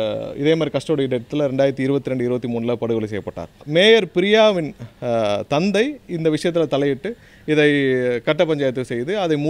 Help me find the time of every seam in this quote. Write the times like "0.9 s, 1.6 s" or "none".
3.6 s